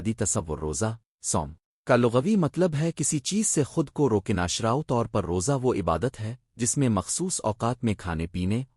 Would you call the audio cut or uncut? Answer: cut